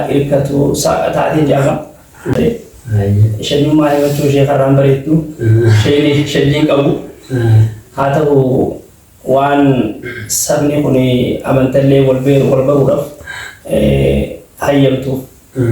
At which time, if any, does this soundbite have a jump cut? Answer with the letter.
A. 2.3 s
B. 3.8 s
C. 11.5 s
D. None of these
A